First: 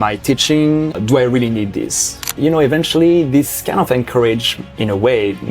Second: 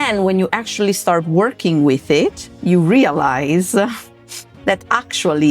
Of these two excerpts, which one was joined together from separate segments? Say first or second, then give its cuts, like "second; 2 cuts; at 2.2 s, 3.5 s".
first; 2 cuts; at 0.9 s, 2.2 s